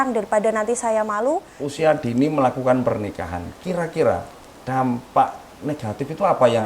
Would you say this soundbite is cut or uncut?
cut